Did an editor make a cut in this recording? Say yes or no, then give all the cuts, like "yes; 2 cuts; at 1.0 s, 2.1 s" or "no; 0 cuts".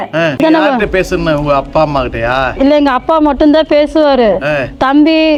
no; 0 cuts